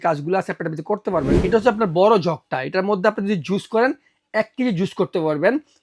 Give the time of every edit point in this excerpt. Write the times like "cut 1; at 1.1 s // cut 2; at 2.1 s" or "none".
cut 1; at 1.3 s